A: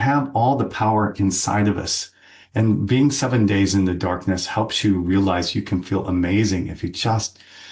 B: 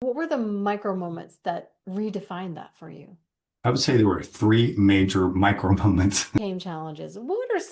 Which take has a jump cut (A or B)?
B